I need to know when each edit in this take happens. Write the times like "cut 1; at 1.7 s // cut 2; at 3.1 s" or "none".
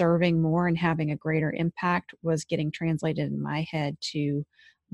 none